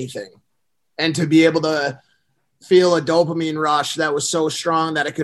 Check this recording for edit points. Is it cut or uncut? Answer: uncut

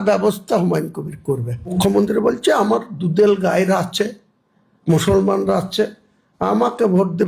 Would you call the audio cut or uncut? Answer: cut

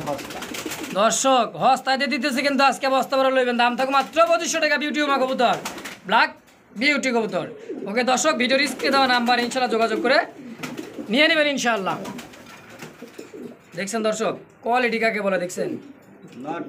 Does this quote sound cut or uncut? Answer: uncut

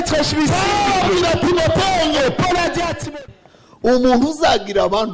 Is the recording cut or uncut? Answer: cut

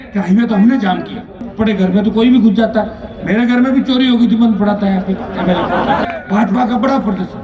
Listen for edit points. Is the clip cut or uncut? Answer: cut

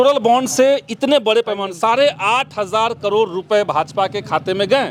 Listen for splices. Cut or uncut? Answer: uncut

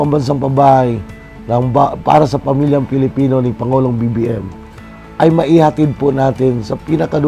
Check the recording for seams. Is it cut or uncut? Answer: uncut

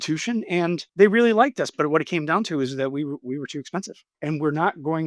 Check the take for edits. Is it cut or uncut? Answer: cut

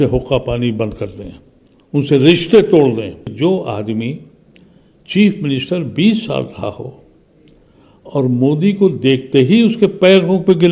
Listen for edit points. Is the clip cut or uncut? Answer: cut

